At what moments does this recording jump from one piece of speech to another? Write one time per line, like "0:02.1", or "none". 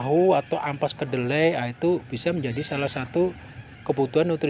none